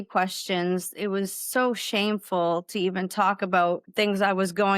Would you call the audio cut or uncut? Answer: cut